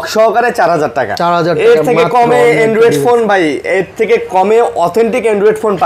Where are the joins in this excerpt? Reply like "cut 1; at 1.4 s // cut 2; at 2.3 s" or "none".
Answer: none